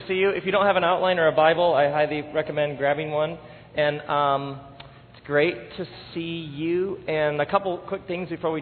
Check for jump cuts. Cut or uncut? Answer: uncut